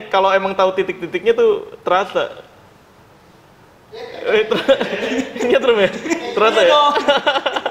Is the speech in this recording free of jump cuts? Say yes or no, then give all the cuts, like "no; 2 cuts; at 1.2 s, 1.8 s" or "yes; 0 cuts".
yes; 0 cuts